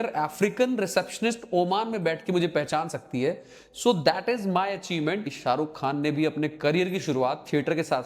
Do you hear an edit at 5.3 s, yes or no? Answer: yes